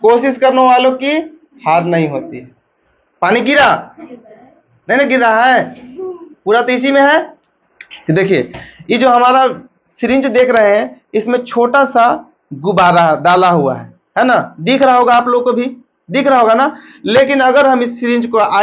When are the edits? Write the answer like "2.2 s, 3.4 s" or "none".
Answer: 7.4 s